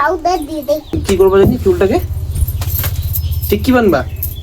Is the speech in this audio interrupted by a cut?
yes; 1 cut; at 1.0 s

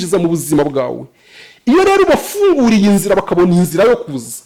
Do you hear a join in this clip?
no; 0 cuts

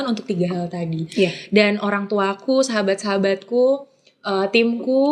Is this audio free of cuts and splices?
yes; 0 cuts

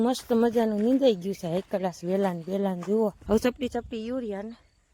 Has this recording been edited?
yes; 1 cut; at 3.2 s

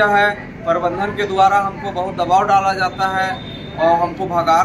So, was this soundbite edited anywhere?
no; 0 cuts

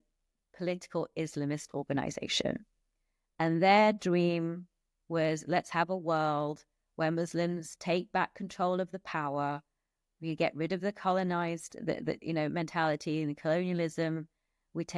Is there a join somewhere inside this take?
no; 0 cuts

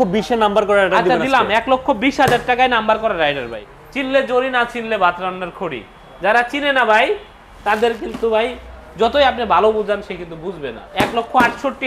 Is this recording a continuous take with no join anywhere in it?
no; 2 cuts; at 3.6 s, 10.8 s

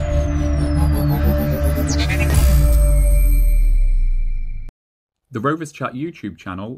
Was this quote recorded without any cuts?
no; 1 cut; at 5.3 s

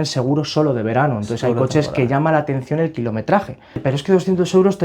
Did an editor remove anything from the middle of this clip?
yes; 1 cut; at 3.8 s

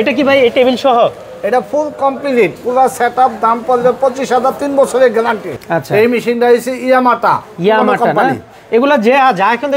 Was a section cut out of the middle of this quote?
no; 0 cuts

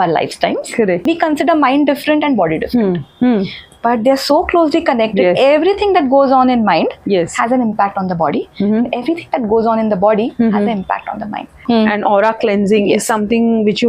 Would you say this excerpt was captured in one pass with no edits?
no; 2 cuts; at 1.0 s, 11.6 s

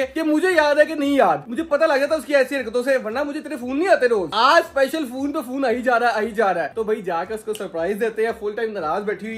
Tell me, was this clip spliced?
no; 0 cuts

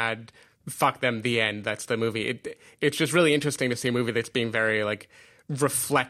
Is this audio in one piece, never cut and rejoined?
yes; 0 cuts

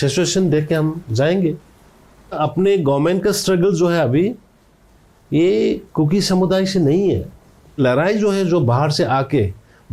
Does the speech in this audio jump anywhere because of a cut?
yes; 2 cuts; at 2.3 s, 7.8 s

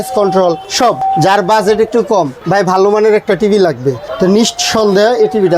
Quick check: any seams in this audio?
yes; 3 cuts; at 0.9 s, 2.4 s, 4.0 s

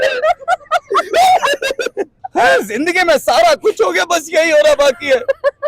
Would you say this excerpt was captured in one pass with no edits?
no; 1 cut; at 2.2 s

